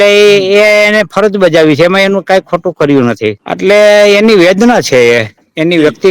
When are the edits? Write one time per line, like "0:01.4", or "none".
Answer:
0:03.5